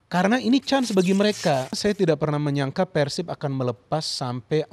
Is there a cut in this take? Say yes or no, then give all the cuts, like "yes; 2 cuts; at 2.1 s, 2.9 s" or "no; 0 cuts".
yes; 1 cut; at 1.8 s